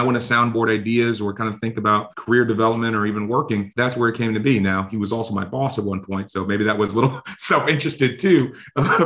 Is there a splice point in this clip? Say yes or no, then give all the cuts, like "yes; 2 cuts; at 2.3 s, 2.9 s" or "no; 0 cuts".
yes; 2 cuts; at 2.1 s, 3.7 s